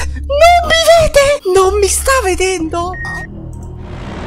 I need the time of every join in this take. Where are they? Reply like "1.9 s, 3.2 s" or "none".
3.0 s

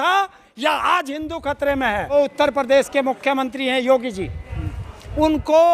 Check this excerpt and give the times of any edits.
2.1 s

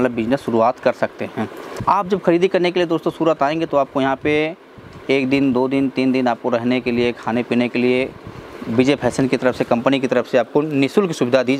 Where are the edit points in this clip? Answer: 1.8 s

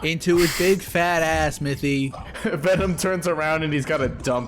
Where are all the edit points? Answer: 2.2 s

